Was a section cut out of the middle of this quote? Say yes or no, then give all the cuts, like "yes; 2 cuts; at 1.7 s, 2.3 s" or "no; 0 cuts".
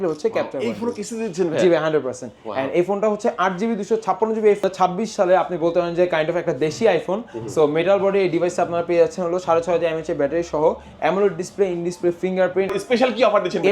yes; 2 cuts; at 4.6 s, 12.7 s